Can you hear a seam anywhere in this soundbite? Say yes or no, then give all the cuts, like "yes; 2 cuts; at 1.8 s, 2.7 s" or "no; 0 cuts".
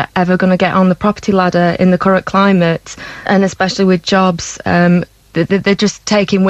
yes; 2 cuts; at 3.3 s, 5.2 s